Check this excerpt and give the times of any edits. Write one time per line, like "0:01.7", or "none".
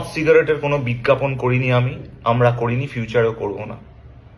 none